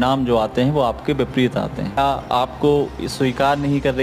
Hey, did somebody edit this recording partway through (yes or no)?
yes